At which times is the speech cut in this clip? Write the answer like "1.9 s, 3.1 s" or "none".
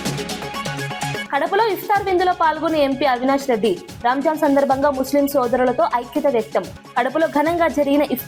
1.2 s